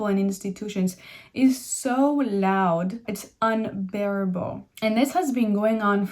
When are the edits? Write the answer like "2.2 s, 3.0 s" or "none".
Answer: 3.0 s, 4.6 s